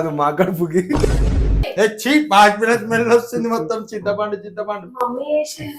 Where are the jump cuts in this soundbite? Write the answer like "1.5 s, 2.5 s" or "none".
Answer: 1.6 s

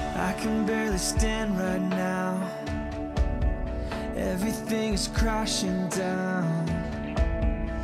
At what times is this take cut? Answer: none

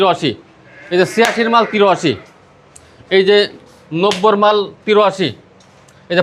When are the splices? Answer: none

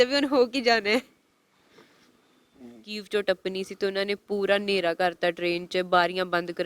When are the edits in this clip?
3.0 s

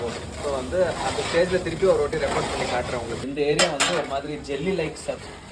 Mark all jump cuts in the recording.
3.2 s

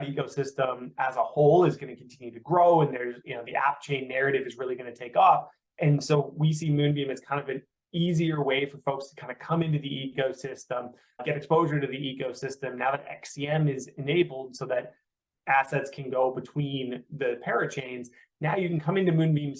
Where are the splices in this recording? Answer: 11.2 s

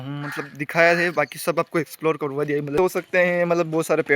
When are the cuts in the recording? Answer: 2.8 s

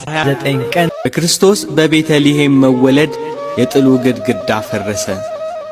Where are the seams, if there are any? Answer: 1.1 s

